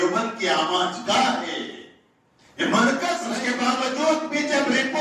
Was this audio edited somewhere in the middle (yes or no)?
yes